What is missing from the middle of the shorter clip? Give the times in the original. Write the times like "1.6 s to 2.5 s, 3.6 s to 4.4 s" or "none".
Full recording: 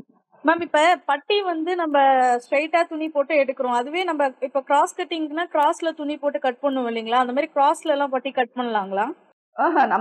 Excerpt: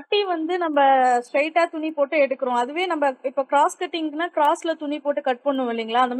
none